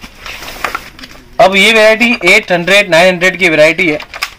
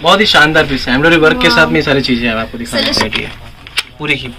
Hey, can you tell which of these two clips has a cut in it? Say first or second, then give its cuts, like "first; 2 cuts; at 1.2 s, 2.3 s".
second; 1 cut; at 3.1 s